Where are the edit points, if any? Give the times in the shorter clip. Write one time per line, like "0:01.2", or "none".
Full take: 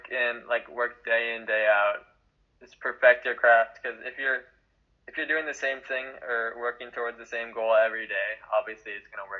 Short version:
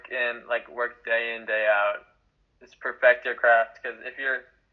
none